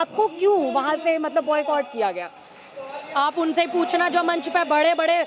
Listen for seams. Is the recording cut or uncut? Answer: uncut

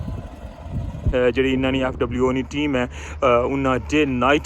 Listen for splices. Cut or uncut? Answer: cut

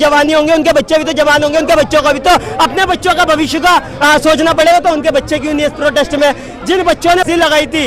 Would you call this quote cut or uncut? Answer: uncut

